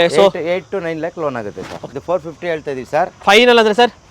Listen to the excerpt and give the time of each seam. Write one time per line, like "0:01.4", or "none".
0:01.8